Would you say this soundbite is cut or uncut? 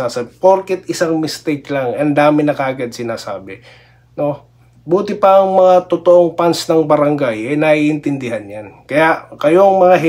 uncut